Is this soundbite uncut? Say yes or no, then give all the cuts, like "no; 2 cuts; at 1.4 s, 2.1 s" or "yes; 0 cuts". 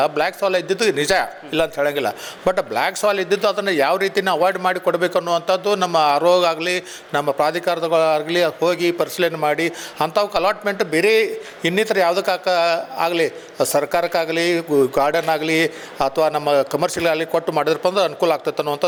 yes; 0 cuts